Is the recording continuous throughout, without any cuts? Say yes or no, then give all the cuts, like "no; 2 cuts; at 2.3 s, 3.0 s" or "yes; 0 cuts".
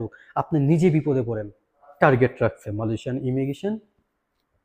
no; 1 cut; at 1.9 s